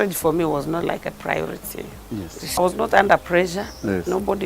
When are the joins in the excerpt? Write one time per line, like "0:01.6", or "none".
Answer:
0:02.6